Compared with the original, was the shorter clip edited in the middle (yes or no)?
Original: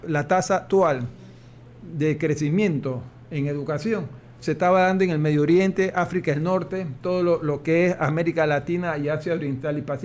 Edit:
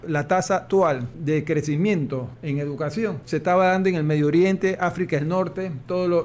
yes